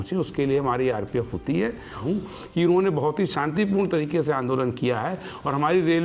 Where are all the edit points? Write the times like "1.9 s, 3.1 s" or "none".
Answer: 2.0 s